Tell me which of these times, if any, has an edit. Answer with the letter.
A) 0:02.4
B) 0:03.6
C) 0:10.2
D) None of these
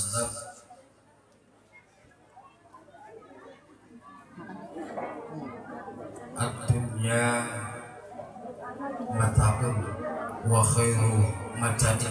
D